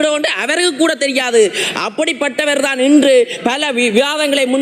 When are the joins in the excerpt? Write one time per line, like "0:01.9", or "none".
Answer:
none

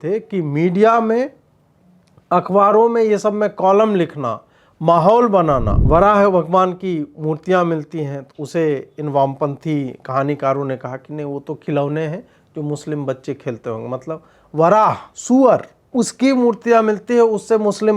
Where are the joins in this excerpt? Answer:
0:05.7
0:15.1
0:15.8

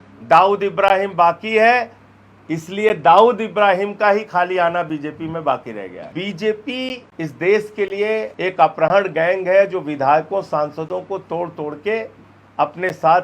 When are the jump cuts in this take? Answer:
0:06.1
0:07.0
0:08.3

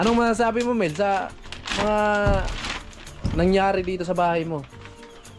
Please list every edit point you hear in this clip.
none

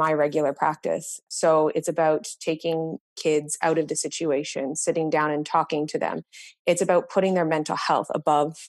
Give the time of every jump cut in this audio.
0:01.2

